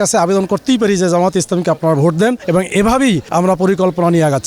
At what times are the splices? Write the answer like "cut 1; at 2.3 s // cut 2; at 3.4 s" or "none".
cut 1; at 2.4 s // cut 2; at 3.2 s